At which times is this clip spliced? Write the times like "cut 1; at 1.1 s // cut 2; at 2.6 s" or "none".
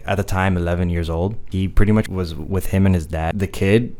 cut 1; at 1.4 s // cut 2; at 2.1 s // cut 3; at 3.3 s